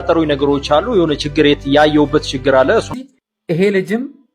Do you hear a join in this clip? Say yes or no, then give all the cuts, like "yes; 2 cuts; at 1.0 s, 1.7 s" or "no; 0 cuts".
yes; 1 cut; at 2.9 s